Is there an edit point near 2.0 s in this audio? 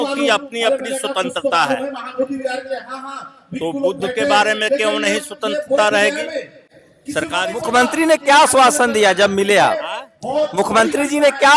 no; 0 cuts

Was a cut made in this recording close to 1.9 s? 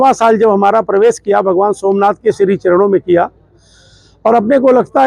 no; 0 cuts

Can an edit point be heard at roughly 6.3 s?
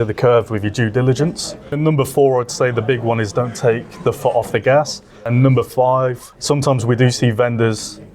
yes; 3 cuts; at 1.7 s, 5.3 s, 6.3 s

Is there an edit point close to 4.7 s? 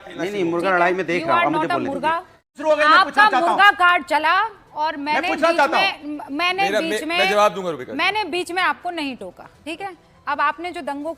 no; 1 cut; at 2.5 s

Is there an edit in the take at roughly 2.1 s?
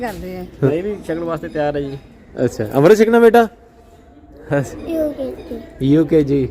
no; 2 cuts; at 0.7 s, 4.7 s

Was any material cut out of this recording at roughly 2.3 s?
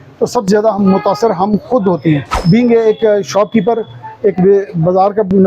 yes; 1 cut; at 2.3 s

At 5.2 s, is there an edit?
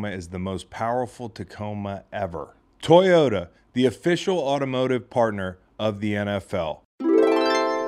no; 1 cut; at 6.8 s

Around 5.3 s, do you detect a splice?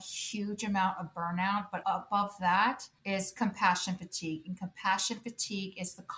no; 2 cuts; at 1.8 s, 2.9 s

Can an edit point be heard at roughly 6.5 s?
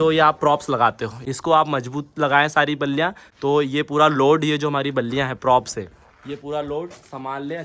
no; 2 cuts; at 1.1 s, 3.2 s

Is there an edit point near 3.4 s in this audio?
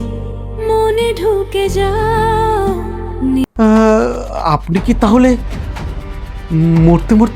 yes; 1 cut; at 3.4 s

